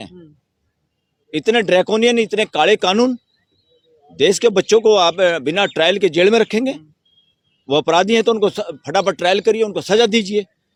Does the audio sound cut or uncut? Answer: uncut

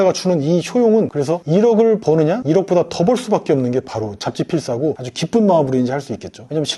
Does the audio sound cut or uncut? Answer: cut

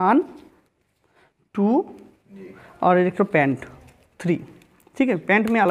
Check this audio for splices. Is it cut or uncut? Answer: uncut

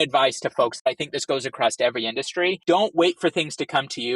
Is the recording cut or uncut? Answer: cut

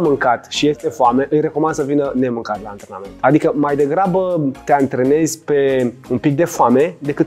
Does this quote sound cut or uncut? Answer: cut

